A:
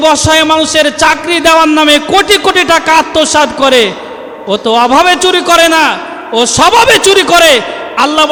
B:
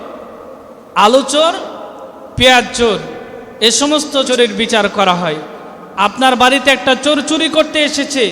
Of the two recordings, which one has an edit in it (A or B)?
B